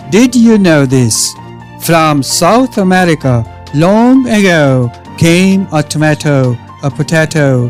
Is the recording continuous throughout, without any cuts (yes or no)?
yes